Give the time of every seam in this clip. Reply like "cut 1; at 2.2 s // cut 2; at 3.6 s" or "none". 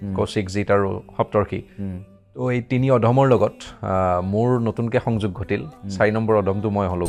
none